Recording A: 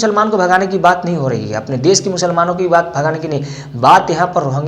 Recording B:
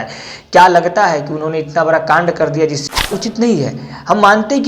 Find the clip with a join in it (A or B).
B